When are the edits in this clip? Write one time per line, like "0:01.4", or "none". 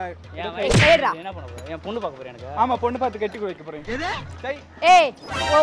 none